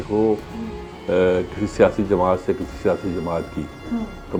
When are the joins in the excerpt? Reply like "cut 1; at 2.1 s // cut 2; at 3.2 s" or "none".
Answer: none